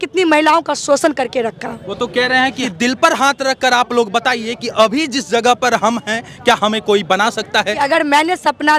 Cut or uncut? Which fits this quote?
uncut